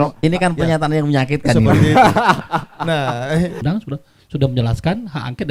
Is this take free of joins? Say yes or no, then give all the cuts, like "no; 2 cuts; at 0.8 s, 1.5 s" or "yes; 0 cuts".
no; 1 cut; at 3.6 s